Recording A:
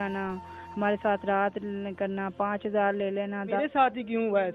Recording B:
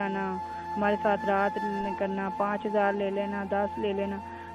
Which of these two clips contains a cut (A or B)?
A